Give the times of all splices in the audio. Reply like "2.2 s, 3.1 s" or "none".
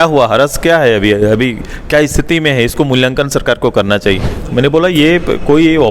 4.3 s